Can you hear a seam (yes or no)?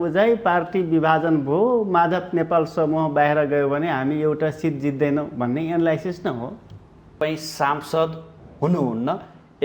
yes